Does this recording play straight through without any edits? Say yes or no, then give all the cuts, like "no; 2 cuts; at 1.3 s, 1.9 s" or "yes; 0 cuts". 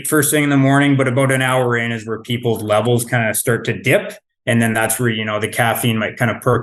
yes; 0 cuts